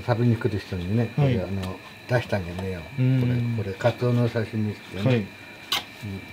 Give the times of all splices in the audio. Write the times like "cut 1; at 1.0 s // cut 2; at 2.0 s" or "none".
none